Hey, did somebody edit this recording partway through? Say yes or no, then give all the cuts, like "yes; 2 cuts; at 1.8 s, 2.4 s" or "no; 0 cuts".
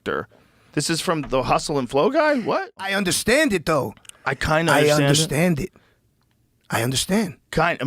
yes; 1 cut; at 2.9 s